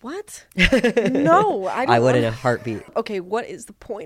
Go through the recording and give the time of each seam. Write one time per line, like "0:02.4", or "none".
0:02.9